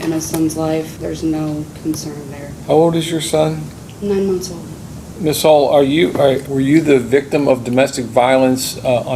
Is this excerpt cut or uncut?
cut